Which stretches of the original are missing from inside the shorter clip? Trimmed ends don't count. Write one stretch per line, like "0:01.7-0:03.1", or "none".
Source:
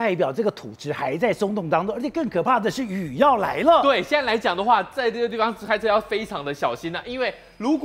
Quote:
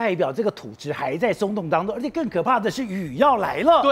none